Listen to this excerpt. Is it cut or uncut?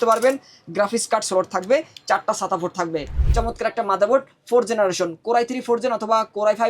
cut